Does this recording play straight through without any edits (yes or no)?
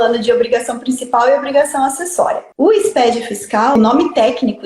no